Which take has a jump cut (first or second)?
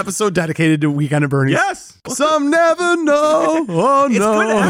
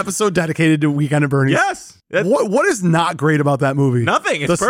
first